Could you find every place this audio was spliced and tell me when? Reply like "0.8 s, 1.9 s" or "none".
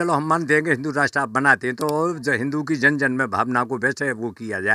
none